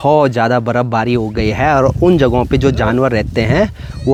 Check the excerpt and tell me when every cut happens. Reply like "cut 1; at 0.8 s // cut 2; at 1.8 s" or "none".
none